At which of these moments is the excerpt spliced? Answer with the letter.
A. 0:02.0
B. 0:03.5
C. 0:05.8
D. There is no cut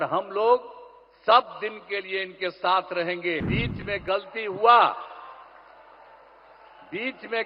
B